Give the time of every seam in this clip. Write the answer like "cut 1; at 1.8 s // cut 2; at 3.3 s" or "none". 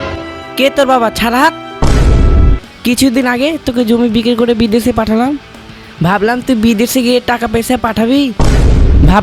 none